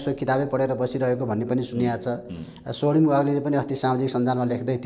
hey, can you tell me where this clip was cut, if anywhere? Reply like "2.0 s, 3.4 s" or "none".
none